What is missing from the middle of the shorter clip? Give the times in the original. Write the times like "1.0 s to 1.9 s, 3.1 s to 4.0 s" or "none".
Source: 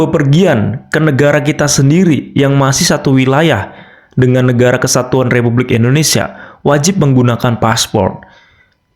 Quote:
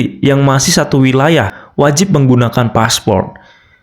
3.7 s to 6.5 s